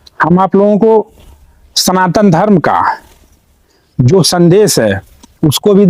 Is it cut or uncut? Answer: uncut